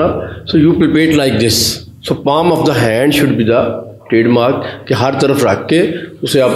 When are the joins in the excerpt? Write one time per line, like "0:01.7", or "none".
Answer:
none